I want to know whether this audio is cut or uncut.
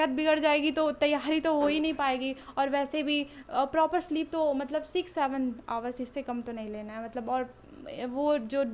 uncut